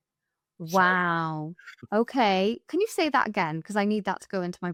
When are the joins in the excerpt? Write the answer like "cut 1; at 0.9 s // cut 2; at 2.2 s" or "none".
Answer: none